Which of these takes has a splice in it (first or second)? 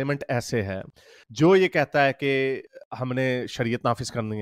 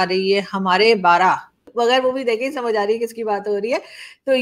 second